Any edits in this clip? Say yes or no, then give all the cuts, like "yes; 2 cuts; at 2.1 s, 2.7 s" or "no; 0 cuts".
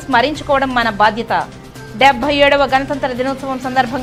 no; 0 cuts